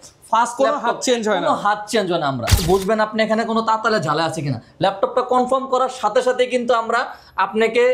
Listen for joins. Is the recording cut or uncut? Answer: cut